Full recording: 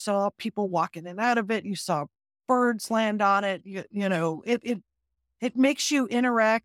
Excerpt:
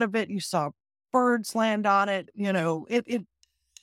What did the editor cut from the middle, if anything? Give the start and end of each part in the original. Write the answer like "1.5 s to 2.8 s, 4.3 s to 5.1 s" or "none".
3.7 s to 3.9 s